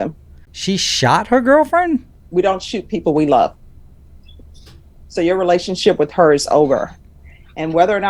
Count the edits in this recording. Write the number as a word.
one